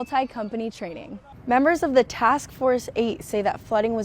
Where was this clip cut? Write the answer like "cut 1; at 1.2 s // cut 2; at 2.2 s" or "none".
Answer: cut 1; at 1.3 s